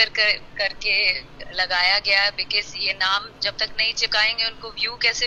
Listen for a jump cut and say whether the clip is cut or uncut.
uncut